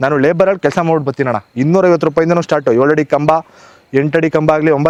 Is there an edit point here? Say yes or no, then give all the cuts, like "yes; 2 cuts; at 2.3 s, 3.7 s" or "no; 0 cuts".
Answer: no; 0 cuts